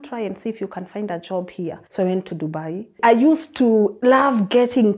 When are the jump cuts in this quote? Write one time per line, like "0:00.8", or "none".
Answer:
0:01.8
0:02.9
0:03.9